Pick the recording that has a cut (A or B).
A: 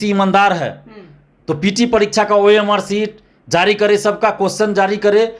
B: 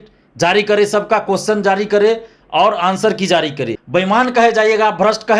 B